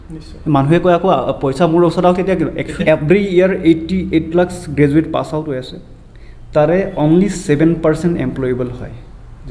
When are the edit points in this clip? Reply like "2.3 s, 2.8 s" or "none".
2.7 s